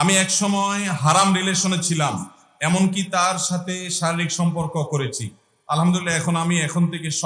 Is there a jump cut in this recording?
no; 0 cuts

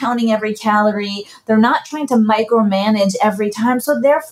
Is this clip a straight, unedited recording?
yes; 0 cuts

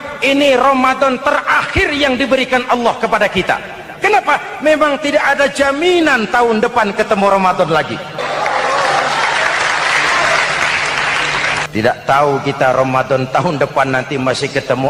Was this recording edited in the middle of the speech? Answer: yes; 2 cuts; at 8.2 s, 11.7 s

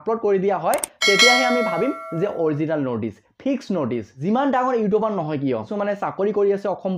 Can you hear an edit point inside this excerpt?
yes; 2 cuts; at 4.1 s, 5.7 s

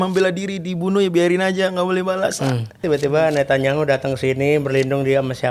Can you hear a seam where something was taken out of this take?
yes; 1 cut; at 2.8 s

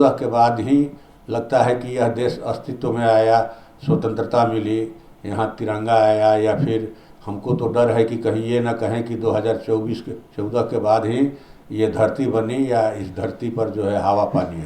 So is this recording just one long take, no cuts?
yes; 0 cuts

